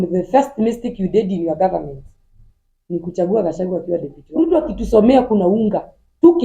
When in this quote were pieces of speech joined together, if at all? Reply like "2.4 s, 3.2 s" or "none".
4.2 s